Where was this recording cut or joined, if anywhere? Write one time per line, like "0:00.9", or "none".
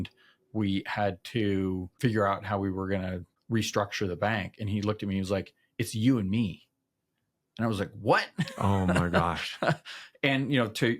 0:01.9
0:03.3